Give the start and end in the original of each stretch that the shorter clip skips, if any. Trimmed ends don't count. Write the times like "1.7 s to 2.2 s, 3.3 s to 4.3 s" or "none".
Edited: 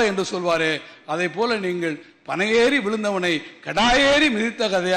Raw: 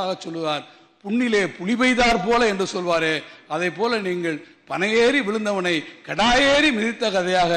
none